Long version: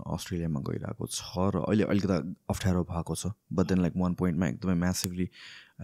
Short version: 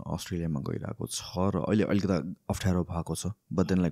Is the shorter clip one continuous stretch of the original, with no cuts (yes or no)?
yes